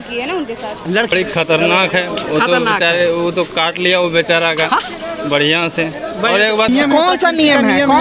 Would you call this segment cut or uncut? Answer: cut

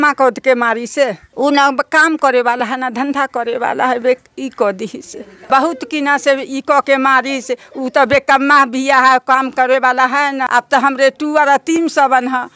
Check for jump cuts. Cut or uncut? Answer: cut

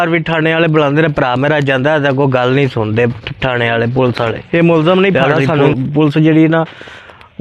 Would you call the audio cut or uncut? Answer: cut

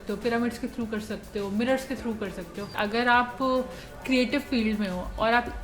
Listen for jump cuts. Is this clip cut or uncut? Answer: cut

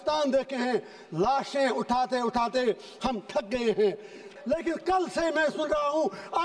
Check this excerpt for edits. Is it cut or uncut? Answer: cut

